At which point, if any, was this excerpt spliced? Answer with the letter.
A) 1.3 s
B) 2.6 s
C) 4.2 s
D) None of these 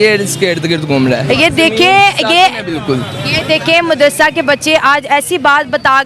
A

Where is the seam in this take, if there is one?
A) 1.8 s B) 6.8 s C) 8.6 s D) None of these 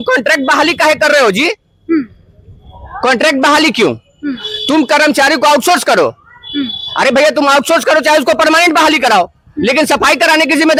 D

